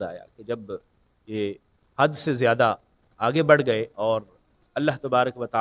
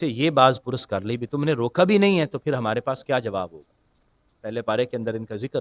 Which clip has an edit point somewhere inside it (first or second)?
second